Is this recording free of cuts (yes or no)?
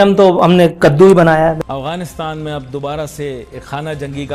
no